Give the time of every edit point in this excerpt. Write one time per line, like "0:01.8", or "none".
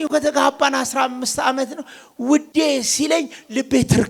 none